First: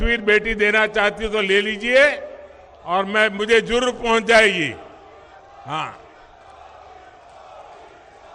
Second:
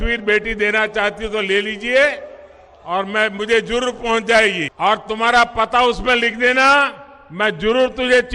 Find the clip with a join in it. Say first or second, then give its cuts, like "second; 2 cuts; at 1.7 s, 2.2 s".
second; 1 cut; at 4.7 s